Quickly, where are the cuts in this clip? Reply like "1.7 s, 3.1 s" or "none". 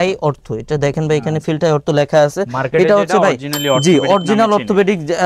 none